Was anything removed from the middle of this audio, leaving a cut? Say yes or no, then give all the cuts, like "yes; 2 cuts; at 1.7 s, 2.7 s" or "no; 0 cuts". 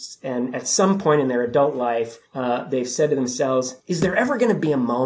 yes; 2 cuts; at 2.2 s, 3.8 s